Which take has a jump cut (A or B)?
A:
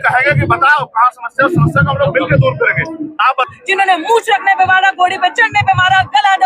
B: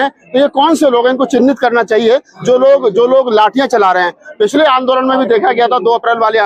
A